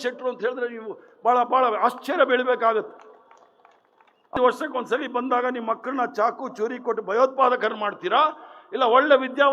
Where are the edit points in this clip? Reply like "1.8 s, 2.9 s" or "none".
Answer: 4.3 s